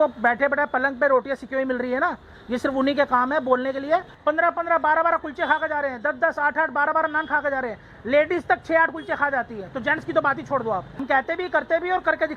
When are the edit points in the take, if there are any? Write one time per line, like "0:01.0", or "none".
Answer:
0:04.1
0:11.0